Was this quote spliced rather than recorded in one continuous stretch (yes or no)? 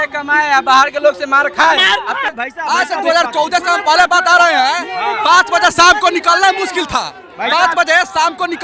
yes